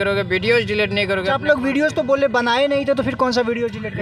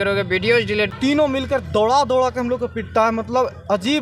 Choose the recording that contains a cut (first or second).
second